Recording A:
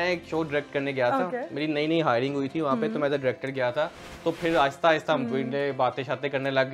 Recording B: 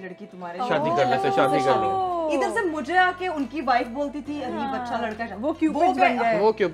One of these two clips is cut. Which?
A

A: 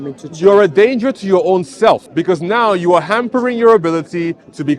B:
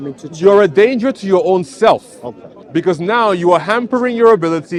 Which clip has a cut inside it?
A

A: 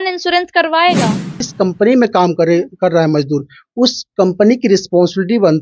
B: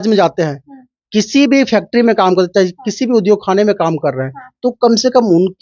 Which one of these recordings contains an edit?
A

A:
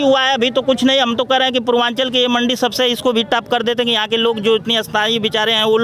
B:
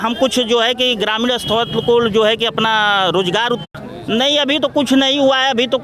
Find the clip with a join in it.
B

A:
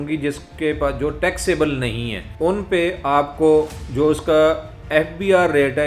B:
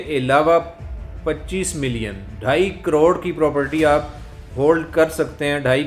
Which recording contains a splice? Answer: A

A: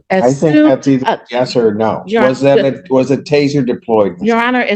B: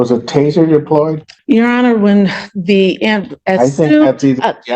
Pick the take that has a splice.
B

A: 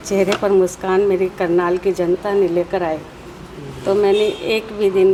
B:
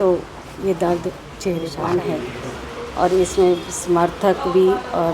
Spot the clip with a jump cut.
B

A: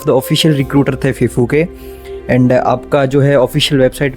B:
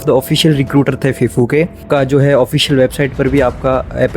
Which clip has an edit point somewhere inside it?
B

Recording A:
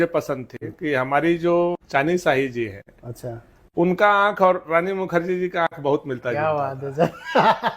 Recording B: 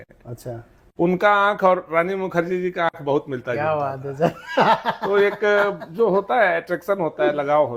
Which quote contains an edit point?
A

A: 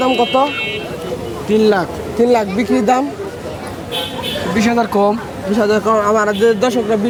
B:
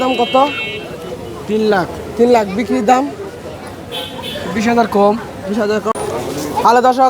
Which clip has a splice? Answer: B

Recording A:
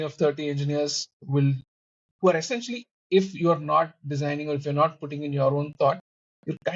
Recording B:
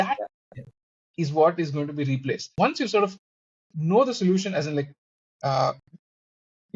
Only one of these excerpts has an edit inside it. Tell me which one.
B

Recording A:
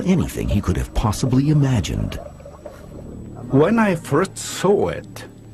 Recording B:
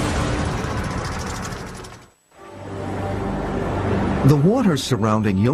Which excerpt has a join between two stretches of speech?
A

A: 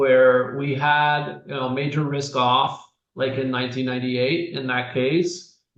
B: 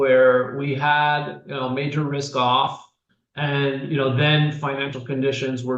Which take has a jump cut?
B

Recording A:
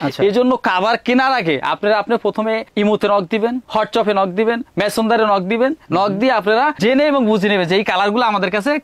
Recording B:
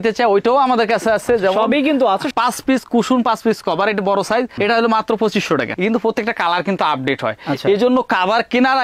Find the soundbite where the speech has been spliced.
B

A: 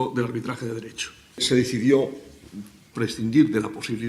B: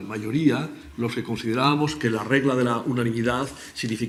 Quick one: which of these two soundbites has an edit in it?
A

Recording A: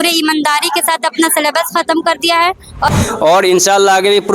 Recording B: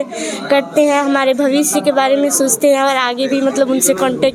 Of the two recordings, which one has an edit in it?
A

